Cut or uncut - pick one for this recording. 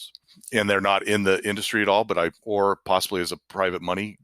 cut